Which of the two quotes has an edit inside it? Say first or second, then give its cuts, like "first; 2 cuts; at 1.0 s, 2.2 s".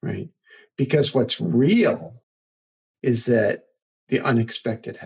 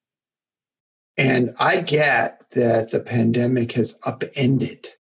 first; 1 cut; at 3.8 s